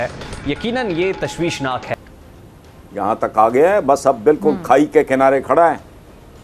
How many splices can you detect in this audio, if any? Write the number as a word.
one